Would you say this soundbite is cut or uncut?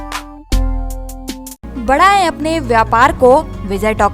uncut